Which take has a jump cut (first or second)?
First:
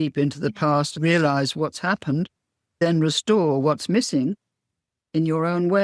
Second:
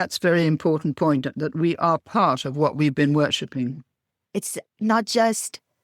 first